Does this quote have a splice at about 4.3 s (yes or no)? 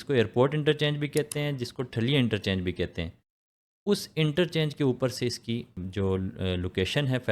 no